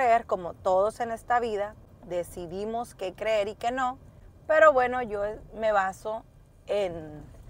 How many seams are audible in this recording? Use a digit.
0